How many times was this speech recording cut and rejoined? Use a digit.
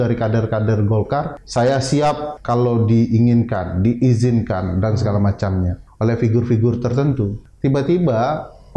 4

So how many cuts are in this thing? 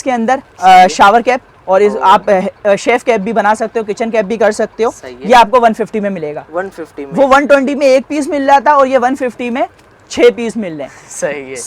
0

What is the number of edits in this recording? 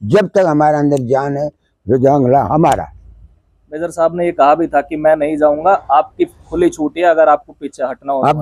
0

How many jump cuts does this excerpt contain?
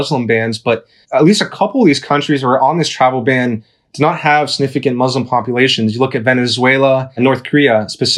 2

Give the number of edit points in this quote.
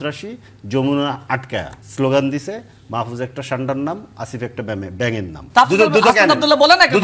2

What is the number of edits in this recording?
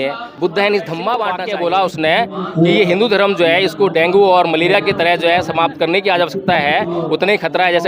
1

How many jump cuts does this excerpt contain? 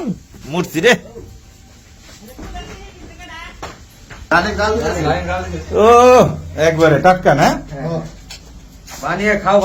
0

